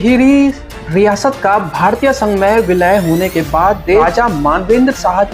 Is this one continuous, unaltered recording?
no; 1 cut; at 4.0 s

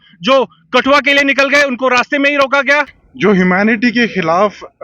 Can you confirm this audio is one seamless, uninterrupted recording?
no; 1 cut; at 3.0 s

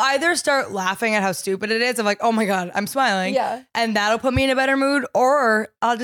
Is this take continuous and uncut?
yes; 0 cuts

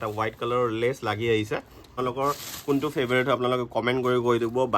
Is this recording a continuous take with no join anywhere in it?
no; 1 cut; at 1.9 s

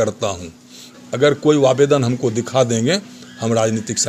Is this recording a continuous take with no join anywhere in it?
no; 1 cut; at 0.9 s

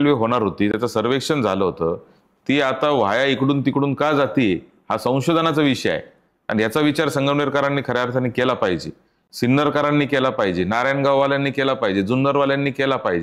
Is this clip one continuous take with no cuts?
yes; 0 cuts

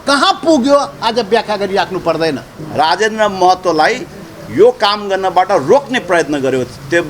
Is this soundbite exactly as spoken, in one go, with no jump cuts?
no; 1 cut; at 2.6 s

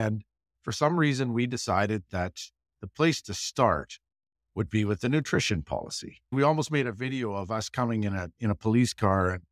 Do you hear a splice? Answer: yes; 1 cut; at 6.3 s

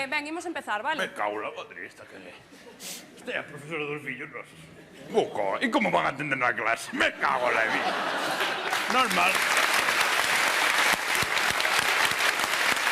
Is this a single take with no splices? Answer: yes; 0 cuts

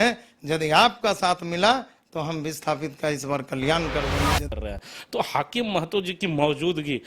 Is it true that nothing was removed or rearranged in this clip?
no; 1 cut; at 4.5 s

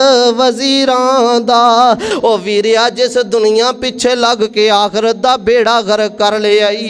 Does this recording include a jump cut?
yes; 1 cut; at 2.1 s

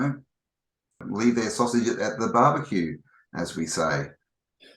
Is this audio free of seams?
no; 1 cut; at 1.0 s

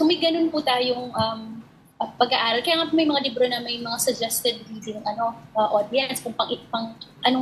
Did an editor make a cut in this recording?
no; 0 cuts

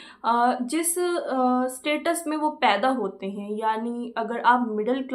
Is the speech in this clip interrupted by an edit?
no; 0 cuts

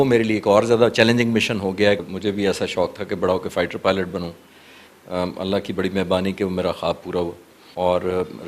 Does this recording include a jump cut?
yes; 1 cut; at 2.1 s

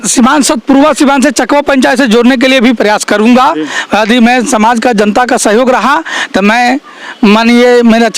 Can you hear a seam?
no; 0 cuts

